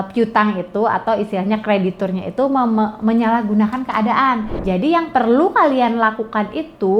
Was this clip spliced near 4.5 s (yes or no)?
yes